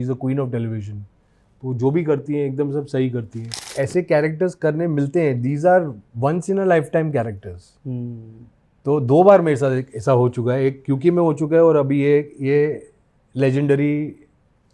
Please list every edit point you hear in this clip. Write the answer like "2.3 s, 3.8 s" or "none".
3.7 s